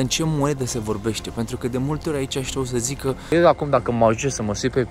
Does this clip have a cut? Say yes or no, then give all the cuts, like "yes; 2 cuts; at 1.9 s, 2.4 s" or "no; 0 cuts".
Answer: yes; 1 cut; at 3.3 s